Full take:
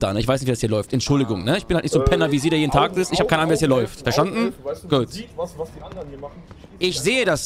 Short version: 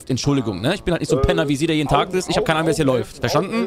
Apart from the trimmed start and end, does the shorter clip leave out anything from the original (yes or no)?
no